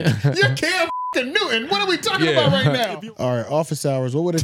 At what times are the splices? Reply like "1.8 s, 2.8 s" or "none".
2.9 s